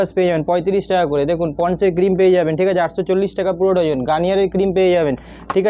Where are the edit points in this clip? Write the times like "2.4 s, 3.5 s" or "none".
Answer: none